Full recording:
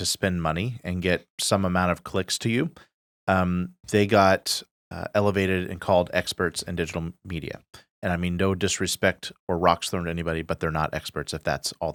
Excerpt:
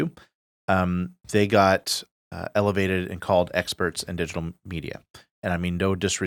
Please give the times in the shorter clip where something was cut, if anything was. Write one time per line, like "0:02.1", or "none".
none